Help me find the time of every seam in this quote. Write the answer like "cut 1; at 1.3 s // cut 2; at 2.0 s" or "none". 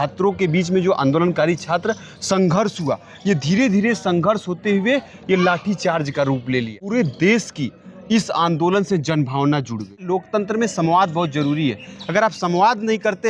cut 1; at 6.8 s // cut 2; at 10.0 s